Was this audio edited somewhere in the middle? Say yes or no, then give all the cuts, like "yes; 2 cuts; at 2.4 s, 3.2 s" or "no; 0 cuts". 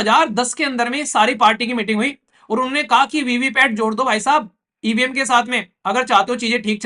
no; 0 cuts